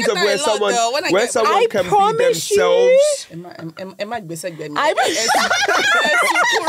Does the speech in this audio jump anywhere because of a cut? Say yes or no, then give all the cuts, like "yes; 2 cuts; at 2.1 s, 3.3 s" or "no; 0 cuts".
no; 0 cuts